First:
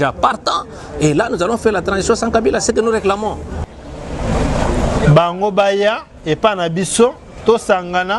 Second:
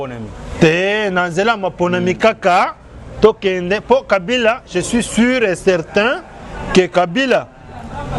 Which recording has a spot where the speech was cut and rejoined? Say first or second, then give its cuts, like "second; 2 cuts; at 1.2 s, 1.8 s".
first; 1 cut; at 3.6 s